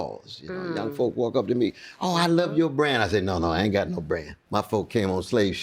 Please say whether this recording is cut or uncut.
cut